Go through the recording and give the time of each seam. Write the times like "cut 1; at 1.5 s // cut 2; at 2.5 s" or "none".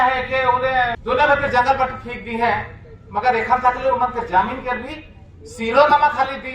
cut 1; at 1.0 s

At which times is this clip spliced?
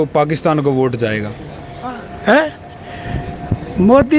cut 1; at 2.1 s

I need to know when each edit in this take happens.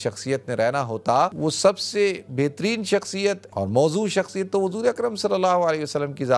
cut 1; at 1.4 s // cut 2; at 3.5 s

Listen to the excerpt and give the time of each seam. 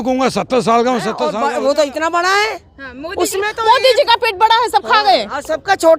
cut 1; at 1.2 s

